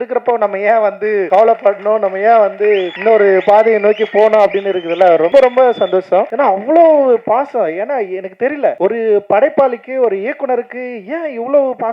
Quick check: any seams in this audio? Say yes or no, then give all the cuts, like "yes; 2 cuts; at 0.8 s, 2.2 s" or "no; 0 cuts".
yes; 5 cuts; at 1.3 s, 2.9 s, 5.3 s, 6.3 s, 8.8 s